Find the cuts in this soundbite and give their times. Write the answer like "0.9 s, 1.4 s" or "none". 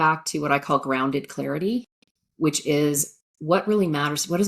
none